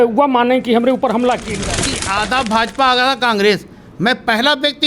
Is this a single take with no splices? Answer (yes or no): no